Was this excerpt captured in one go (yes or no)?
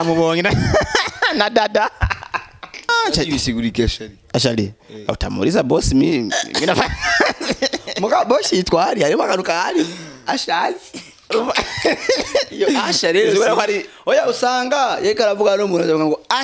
no